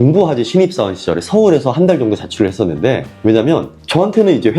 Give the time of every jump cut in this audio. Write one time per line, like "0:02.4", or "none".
0:03.1

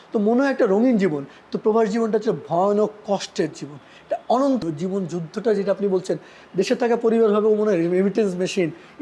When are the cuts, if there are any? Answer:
0:04.6

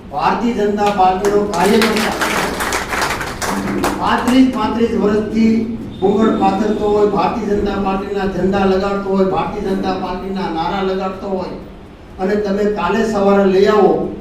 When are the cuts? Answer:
none

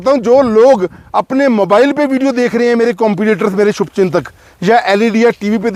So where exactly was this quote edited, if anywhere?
none

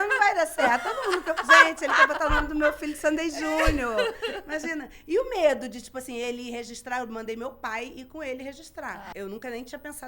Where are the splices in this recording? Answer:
0:09.1

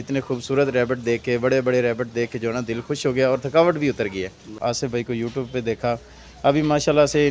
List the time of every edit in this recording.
0:04.6

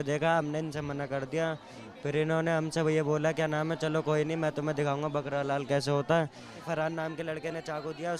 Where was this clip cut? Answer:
0:06.6

